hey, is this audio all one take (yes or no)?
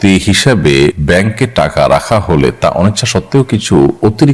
no